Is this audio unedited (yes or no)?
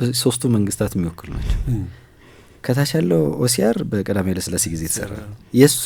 yes